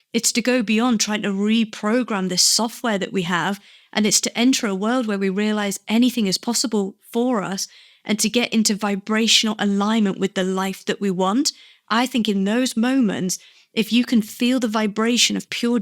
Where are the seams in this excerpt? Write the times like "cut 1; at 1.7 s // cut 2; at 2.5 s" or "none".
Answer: none